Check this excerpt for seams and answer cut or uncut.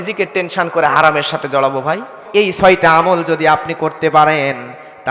cut